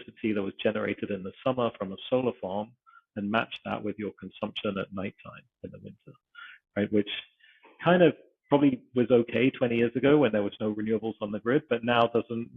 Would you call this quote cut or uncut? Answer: uncut